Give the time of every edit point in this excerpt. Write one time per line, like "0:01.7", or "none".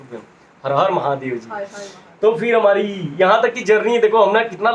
none